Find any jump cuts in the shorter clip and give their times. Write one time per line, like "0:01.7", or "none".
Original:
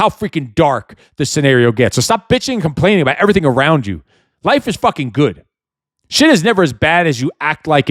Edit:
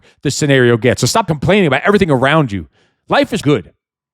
0:01.3
0:03.4